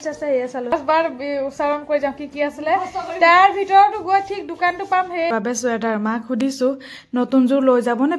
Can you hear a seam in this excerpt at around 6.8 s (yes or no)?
no